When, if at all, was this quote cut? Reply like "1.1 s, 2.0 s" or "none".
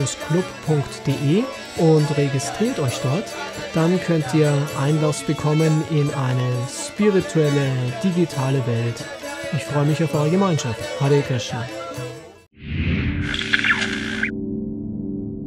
12.5 s